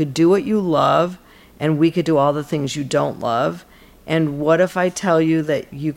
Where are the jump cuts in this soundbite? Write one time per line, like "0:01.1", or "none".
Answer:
none